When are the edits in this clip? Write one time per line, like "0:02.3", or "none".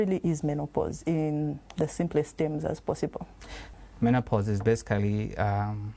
0:03.7